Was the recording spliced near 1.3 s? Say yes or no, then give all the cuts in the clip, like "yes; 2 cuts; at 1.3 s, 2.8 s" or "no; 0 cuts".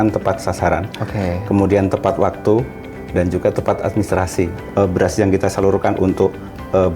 no; 1 cut; at 4.6 s